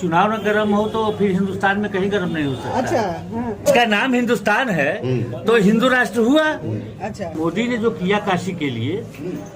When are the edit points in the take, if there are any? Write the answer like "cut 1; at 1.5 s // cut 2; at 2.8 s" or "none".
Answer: cut 1; at 3.7 s // cut 2; at 7.3 s